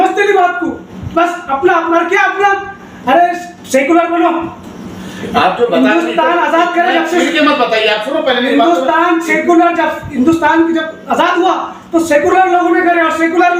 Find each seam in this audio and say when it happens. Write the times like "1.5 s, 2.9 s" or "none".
none